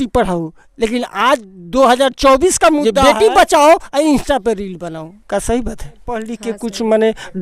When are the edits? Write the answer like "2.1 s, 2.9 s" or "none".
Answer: 2.9 s, 6.3 s

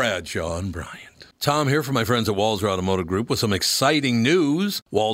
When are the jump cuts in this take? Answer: 1.3 s

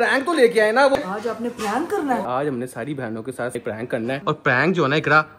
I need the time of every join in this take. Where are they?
0.9 s, 2.2 s, 3.6 s

